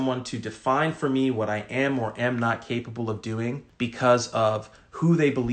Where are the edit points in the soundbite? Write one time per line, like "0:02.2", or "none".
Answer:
0:03.7

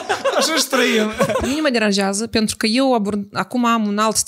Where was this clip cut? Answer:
0:01.5

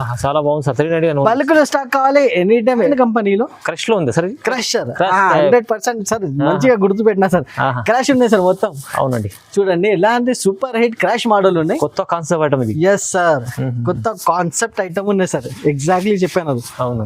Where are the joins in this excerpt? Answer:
0:02.9

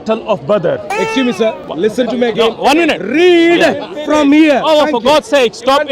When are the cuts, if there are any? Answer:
0:01.6

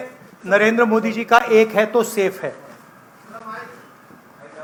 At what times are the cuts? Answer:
none

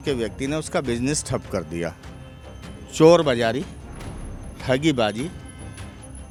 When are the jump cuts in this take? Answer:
none

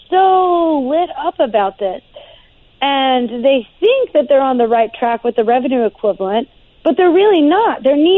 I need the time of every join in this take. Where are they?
none

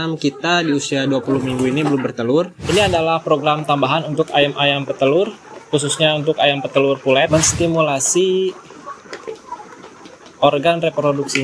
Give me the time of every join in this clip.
0:02.6
0:07.3

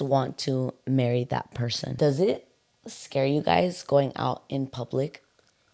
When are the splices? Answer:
0:01.9

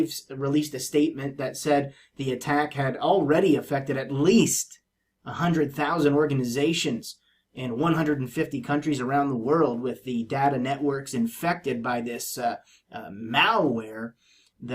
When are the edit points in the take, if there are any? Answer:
0:01.9

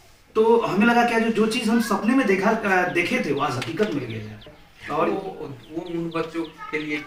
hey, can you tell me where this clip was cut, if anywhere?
none

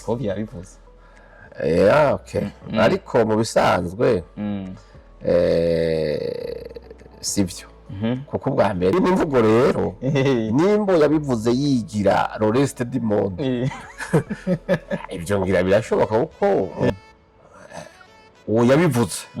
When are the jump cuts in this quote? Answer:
0:08.9
0:16.9

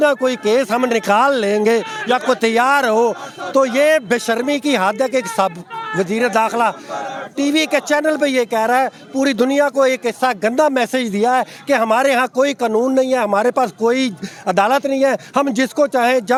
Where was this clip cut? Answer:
none

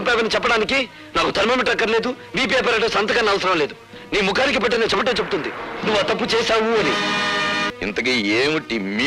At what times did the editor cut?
0:07.7

